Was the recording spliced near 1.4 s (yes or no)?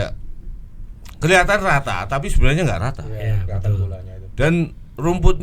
no